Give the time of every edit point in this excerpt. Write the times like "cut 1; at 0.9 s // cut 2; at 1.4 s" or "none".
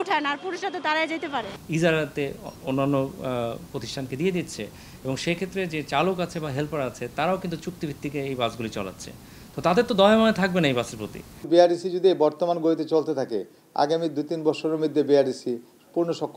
cut 1; at 1.6 s // cut 2; at 11.5 s